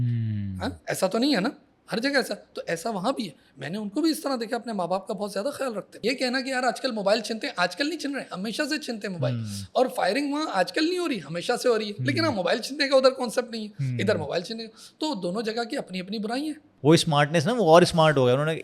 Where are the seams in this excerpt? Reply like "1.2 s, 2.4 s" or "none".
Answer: 6.0 s, 16.6 s